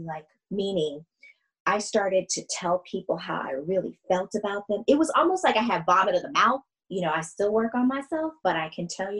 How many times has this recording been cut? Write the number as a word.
one